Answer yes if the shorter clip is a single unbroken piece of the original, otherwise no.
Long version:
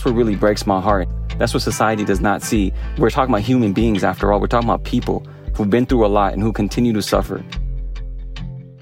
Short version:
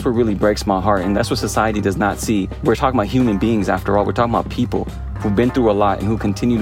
no